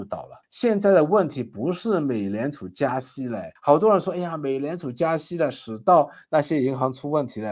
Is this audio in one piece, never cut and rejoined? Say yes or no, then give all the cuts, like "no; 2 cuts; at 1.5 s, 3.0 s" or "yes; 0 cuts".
yes; 0 cuts